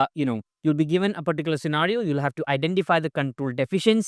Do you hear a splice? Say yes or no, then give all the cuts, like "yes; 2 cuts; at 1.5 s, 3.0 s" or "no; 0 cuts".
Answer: no; 0 cuts